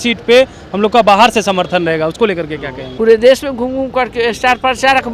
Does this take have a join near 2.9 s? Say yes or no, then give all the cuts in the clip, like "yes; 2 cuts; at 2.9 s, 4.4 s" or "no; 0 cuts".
yes; 1 cut; at 2.9 s